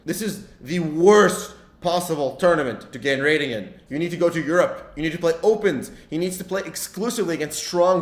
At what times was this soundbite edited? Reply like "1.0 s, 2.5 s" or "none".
none